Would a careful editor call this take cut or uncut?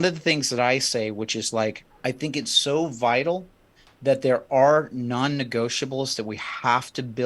cut